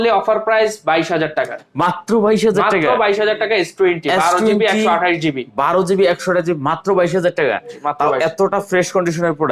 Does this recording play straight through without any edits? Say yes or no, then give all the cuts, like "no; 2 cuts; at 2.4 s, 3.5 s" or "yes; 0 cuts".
yes; 0 cuts